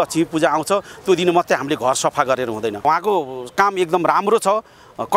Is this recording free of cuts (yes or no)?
no